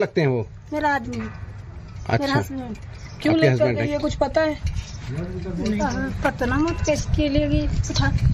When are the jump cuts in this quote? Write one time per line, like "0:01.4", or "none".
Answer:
0:04.4